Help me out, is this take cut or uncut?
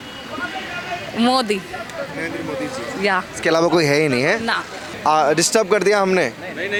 uncut